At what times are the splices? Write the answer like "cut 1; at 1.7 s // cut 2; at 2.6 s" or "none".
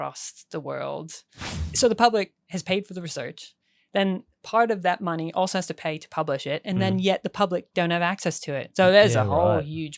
cut 1; at 1.7 s